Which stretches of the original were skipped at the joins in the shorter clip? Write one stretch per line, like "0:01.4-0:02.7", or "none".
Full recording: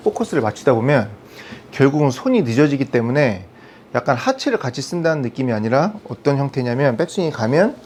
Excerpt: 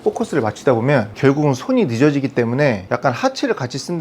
0:01.1-0:01.7
0:03.4-0:03.9